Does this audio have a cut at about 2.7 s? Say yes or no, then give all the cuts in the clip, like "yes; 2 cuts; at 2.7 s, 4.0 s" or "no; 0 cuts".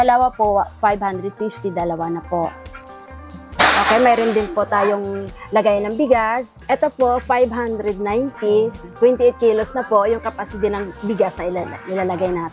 no; 0 cuts